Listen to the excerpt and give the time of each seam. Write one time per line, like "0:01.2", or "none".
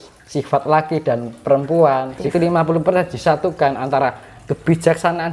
0:02.2